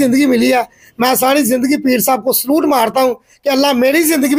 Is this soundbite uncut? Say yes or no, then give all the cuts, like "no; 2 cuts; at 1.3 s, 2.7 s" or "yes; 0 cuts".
yes; 0 cuts